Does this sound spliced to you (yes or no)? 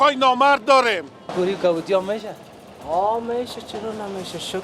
yes